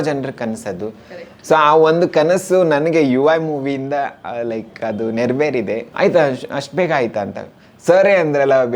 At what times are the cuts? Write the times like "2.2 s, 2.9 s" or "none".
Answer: 5.9 s

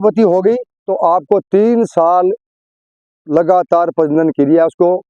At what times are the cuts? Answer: none

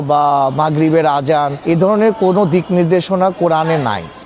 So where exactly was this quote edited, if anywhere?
1.6 s

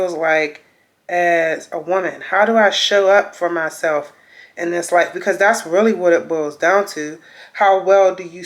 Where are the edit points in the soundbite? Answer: none

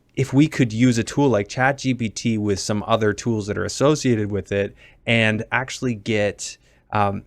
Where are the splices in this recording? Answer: none

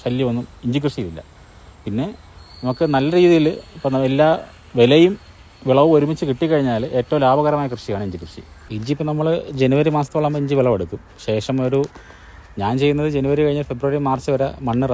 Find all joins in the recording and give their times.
none

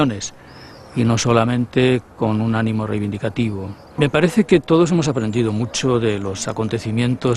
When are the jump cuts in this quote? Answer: none

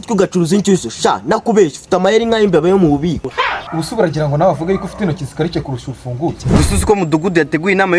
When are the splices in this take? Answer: 6.6 s

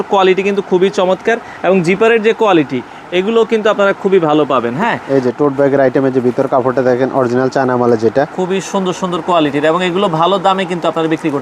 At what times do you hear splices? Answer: 5.0 s, 8.4 s

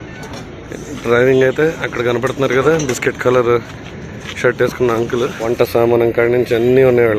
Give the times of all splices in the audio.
5.4 s

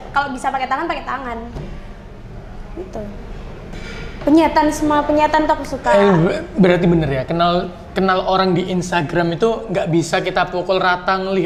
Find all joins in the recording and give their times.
none

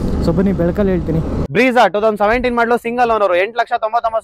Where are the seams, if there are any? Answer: 1.4 s

